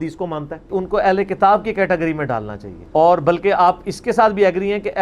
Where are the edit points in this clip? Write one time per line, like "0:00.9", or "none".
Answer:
none